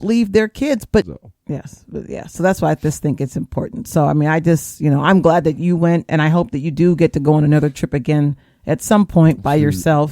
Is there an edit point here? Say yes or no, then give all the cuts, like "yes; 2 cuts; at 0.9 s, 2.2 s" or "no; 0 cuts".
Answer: yes; 1 cut; at 1.2 s